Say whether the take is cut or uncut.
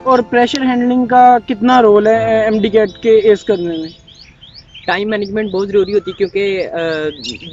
uncut